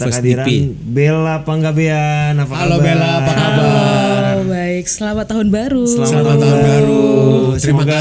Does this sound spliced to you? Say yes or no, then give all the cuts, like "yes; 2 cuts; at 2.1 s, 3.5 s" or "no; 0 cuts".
no; 0 cuts